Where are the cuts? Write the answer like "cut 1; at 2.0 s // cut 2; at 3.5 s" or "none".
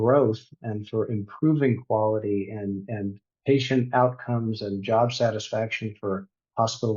none